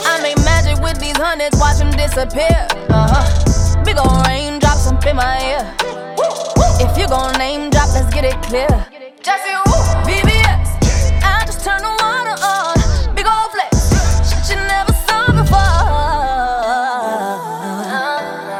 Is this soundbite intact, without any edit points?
yes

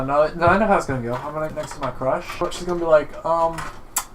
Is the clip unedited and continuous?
no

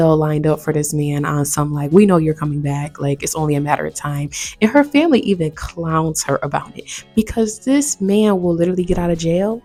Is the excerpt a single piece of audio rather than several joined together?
yes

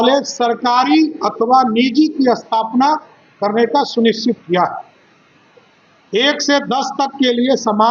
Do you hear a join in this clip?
no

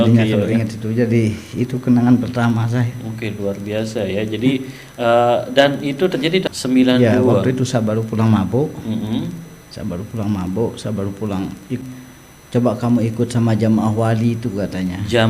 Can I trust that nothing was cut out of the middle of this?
no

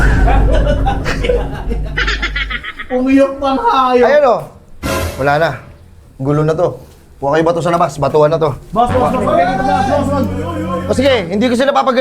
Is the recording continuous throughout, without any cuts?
yes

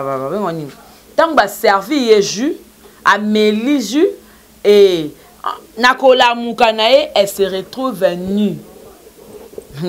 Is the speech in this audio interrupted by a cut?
no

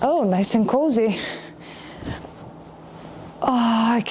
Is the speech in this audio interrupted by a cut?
no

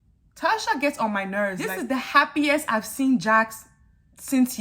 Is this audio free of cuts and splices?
no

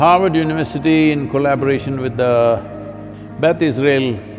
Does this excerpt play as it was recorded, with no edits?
yes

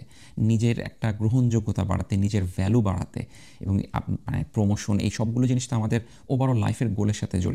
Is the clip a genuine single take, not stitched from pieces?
yes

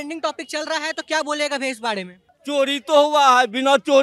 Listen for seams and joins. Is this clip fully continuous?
no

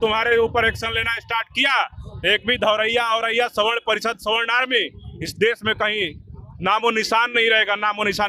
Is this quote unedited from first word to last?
yes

